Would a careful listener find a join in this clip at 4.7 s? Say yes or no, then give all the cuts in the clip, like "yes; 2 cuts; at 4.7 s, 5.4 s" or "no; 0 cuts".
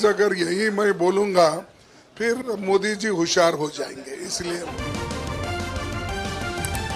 yes; 1 cut; at 4.7 s